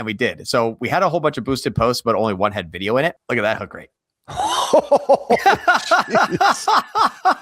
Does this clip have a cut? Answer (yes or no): yes